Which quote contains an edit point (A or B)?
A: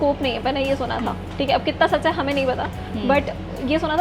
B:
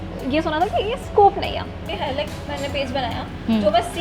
B